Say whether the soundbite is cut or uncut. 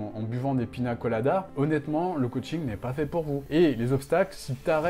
cut